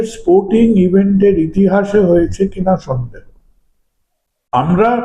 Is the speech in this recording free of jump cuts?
yes; 0 cuts

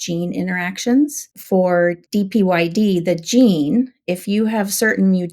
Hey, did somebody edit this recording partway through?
yes; 2 cuts; at 1.3 s, 2.0 s

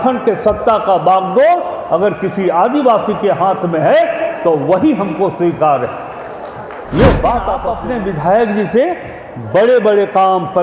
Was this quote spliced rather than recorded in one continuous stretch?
yes; 1 cut; at 7.8 s

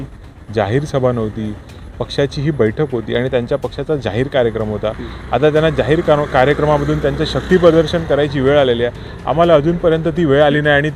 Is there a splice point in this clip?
no; 0 cuts

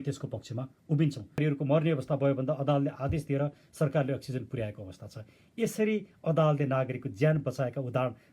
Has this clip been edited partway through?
yes; 1 cut; at 1.4 s

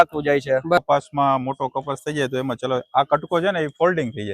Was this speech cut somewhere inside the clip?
yes; 2 cuts; at 0.8 s, 2.4 s

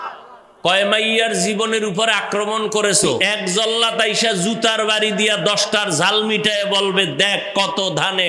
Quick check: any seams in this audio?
yes; 1 cut; at 3.2 s

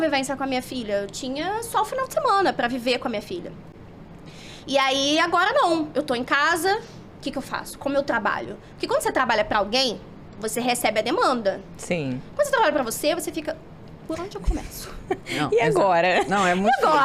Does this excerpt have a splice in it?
no; 0 cuts

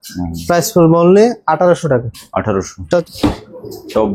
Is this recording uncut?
no; 1 cut; at 3.0 s

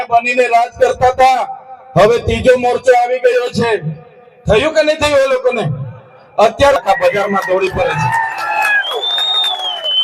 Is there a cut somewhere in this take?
yes; 1 cut; at 6.8 s

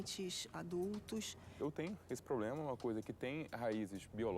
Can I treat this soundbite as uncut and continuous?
no; 1 cut; at 1.6 s

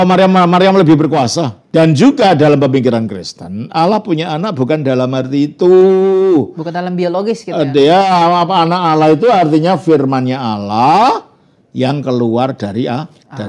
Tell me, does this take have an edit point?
yes; 1 cut; at 1.5 s

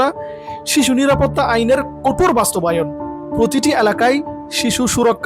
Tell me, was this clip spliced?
no; 0 cuts

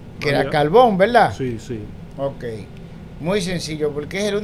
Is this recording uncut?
yes; 0 cuts

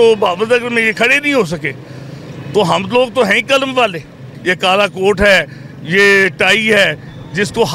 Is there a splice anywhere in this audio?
no; 0 cuts

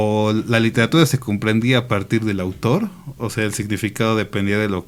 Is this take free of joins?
yes; 0 cuts

